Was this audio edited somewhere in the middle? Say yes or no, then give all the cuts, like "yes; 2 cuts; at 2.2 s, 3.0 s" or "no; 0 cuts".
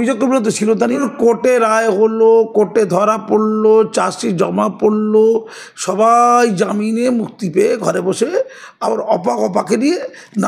yes; 1 cut; at 1.0 s